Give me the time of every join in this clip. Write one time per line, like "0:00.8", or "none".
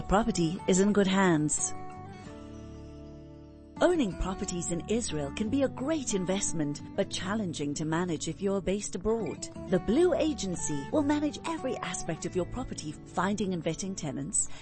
0:01.5
0:03.7